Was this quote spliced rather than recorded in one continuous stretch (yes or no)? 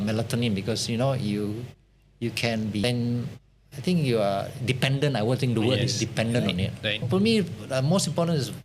yes